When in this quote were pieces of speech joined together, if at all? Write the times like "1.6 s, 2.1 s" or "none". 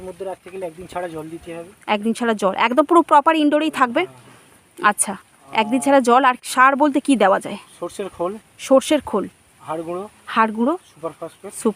none